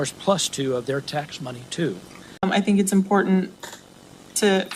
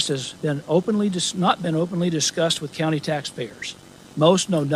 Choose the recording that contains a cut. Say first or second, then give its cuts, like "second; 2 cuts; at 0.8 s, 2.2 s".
first; 1 cut; at 2.4 s